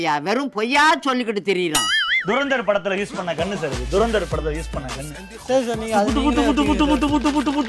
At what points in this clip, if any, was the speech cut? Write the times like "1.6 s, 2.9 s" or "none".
2.1 s